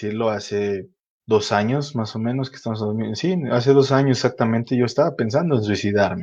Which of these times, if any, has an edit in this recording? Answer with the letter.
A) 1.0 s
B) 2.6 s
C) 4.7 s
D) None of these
D